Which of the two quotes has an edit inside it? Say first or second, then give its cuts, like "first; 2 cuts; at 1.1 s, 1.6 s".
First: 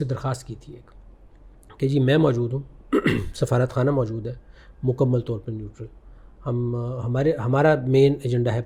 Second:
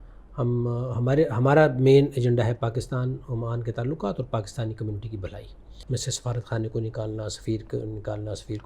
second; 1 cut; at 5.8 s